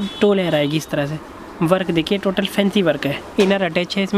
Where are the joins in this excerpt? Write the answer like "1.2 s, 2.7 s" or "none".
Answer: none